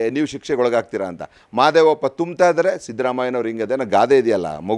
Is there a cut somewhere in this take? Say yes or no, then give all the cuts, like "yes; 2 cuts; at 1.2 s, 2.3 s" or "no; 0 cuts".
no; 0 cuts